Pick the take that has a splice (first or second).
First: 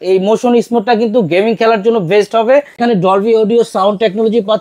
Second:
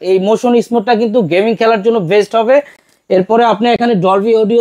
first